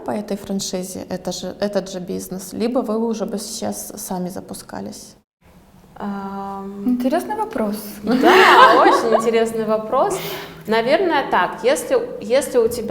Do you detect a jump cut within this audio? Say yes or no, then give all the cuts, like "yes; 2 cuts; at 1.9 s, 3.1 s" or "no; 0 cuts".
no; 0 cuts